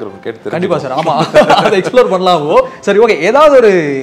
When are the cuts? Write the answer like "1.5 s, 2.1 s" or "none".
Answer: none